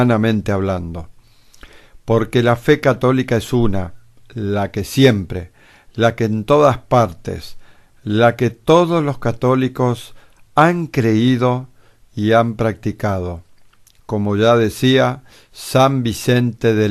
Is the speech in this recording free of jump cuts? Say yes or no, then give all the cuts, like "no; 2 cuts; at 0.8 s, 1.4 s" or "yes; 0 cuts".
yes; 0 cuts